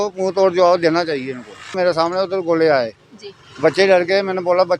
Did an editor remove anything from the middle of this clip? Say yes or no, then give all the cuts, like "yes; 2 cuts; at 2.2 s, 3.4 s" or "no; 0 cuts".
yes; 1 cut; at 1.7 s